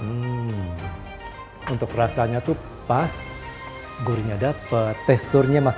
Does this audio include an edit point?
yes; 2 cuts; at 0.9 s, 5.0 s

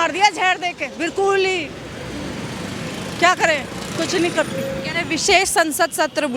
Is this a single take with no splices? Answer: yes; 0 cuts

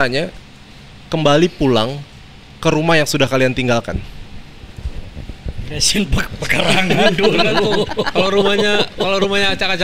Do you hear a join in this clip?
no; 0 cuts

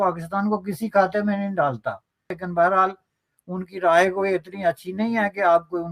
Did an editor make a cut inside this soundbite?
yes; 1 cut; at 2.4 s

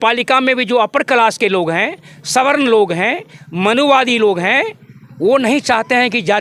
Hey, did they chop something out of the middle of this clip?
no; 0 cuts

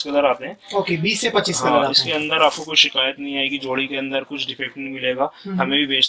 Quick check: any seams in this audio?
no; 0 cuts

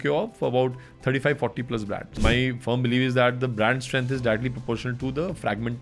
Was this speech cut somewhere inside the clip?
yes; 1 cut; at 2.1 s

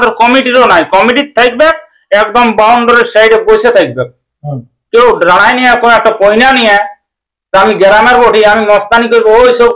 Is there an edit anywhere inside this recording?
no; 0 cuts

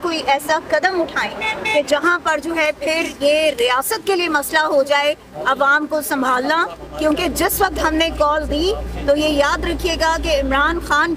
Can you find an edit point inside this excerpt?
no; 0 cuts

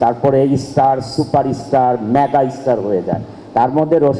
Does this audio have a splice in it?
no; 0 cuts

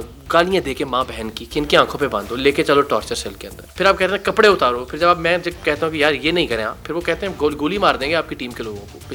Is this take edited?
no; 0 cuts

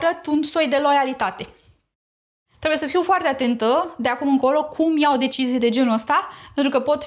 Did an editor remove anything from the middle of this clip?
yes; 1 cut; at 2.4 s

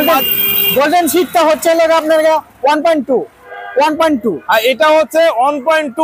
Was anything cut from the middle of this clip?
yes; 1 cut; at 3.4 s

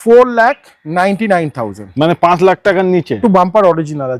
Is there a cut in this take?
yes; 1 cut; at 3.2 s

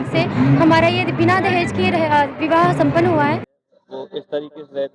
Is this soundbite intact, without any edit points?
no; 1 cut; at 3.5 s

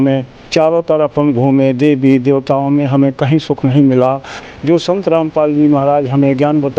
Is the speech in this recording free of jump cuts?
no; 1 cut; at 4.5 s

